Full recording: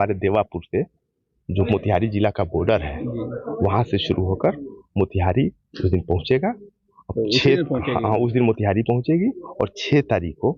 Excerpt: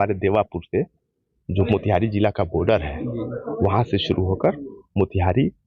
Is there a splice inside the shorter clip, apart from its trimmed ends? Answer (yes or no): no